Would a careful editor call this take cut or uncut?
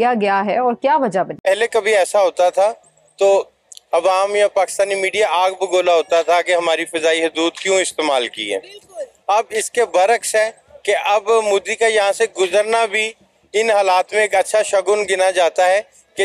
cut